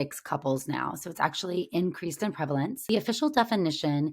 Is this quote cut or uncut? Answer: cut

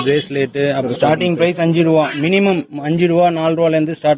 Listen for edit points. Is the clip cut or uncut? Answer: cut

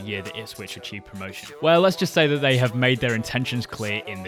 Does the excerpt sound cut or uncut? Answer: uncut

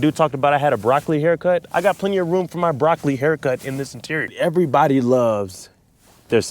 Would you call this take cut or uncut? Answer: cut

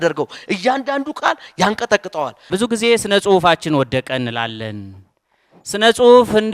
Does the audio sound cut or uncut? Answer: cut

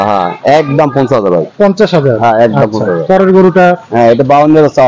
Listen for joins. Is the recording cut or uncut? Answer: uncut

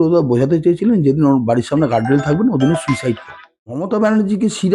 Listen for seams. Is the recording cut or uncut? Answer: cut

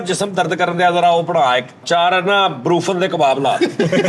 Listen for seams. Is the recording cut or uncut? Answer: cut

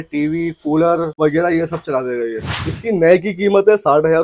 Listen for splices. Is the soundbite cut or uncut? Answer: cut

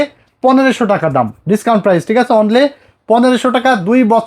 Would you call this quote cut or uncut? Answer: uncut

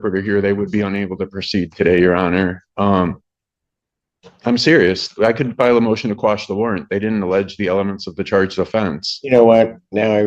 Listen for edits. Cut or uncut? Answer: uncut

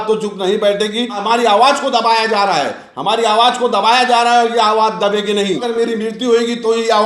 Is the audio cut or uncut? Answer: cut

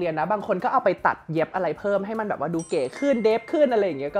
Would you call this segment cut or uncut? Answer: uncut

